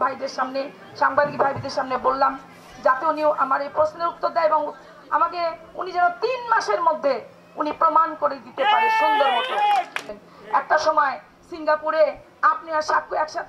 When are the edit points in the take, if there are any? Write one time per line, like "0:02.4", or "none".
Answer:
0:10.1